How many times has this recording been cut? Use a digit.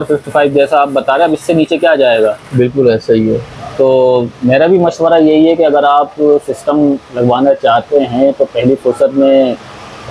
0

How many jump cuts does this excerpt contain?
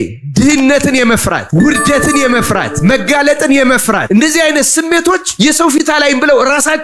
4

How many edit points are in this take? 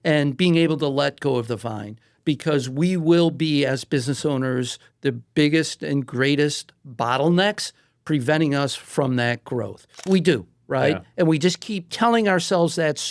2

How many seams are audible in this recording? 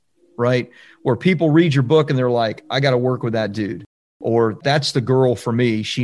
1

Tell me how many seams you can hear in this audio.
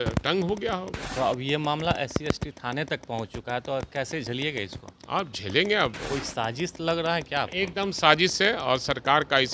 2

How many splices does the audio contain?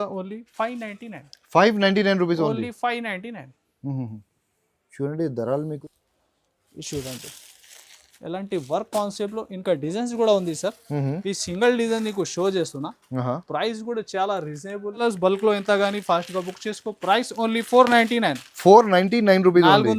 2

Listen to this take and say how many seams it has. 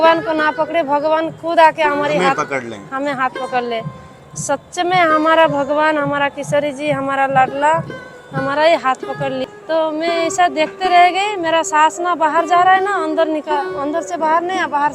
1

